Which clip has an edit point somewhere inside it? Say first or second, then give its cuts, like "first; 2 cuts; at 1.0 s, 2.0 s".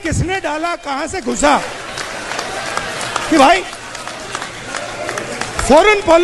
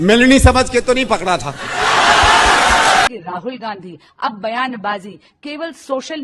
second; 1 cut; at 3.3 s